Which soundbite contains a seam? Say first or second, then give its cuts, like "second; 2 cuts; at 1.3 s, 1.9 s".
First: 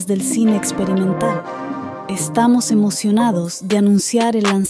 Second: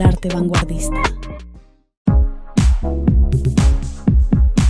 second; 1 cut; at 1.8 s